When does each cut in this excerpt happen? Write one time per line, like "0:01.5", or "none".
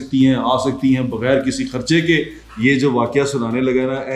0:02.4